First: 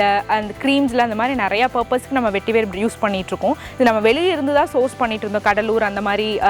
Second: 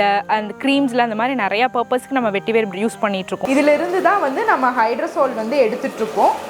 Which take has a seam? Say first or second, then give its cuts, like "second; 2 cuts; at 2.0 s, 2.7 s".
second; 1 cut; at 3.4 s